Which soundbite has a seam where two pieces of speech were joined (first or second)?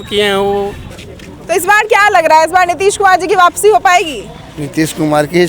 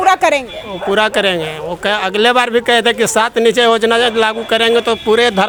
first